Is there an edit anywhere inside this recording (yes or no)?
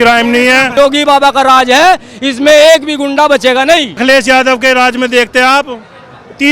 yes